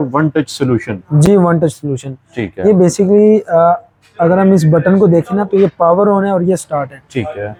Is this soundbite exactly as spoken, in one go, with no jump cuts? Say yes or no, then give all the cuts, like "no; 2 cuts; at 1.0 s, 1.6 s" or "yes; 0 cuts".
yes; 0 cuts